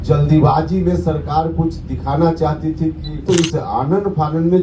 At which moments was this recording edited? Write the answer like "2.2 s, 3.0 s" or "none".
3.2 s

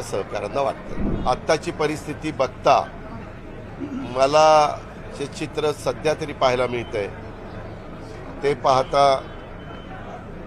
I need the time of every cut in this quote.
1.1 s

